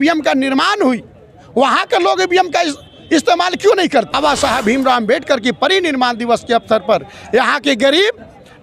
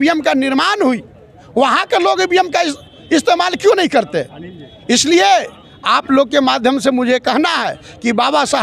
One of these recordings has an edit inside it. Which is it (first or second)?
first